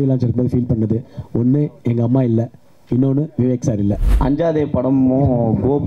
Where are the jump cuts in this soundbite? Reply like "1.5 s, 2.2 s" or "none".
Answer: 4.1 s